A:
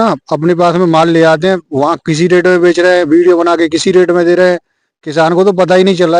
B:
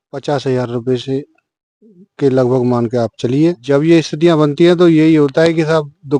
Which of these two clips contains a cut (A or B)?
B